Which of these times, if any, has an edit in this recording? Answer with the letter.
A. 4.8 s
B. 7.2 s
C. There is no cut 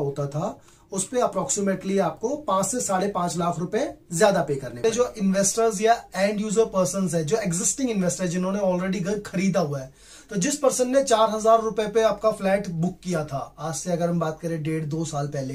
A